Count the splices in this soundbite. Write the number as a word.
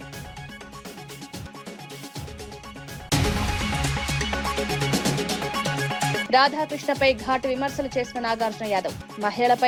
zero